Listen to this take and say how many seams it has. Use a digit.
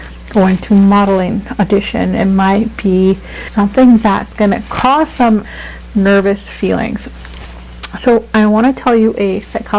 2